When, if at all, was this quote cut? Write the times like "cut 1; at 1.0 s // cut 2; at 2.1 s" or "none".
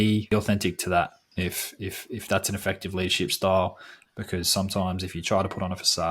cut 1; at 1.2 s